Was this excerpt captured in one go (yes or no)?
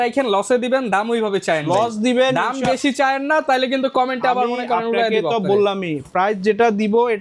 yes